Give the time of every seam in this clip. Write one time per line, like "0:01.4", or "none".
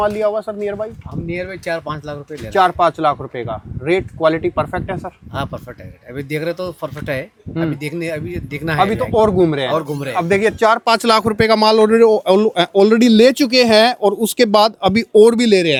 none